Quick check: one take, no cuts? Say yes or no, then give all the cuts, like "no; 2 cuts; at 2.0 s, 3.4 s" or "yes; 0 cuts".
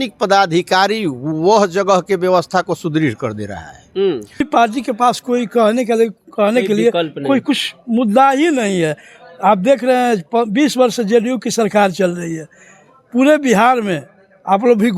no; 1 cut; at 4.4 s